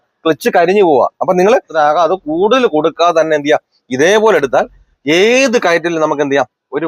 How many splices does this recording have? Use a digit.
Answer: 1